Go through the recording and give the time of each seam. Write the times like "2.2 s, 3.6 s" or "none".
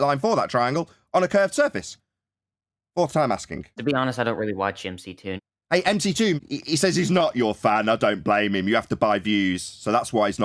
3.8 s, 5.3 s, 6.4 s